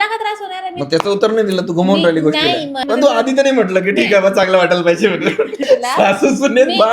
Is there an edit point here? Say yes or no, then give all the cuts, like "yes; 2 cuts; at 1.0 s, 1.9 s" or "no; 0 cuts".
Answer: yes; 2 cuts; at 2.8 s, 5.6 s